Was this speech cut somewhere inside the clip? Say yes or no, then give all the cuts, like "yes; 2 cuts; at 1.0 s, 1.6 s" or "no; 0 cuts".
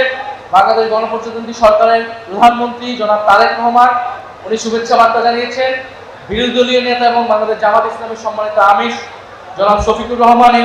no; 0 cuts